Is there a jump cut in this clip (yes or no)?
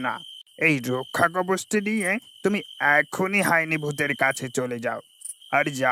no